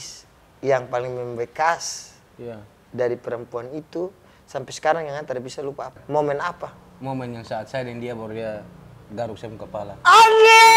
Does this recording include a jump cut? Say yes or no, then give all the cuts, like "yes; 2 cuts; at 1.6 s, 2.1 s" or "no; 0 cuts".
yes; 1 cut; at 6.0 s